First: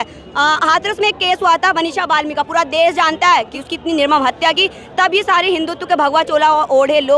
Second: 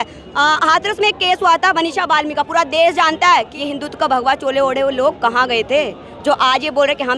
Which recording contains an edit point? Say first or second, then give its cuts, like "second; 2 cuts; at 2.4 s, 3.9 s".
second; 1 cut; at 3.6 s